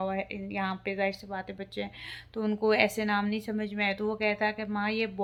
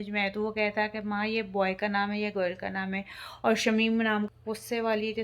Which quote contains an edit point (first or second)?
second